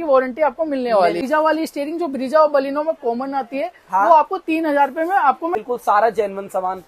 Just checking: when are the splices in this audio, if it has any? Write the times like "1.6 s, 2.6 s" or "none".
1.2 s, 5.5 s

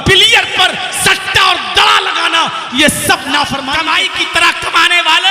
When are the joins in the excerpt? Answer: 3.7 s

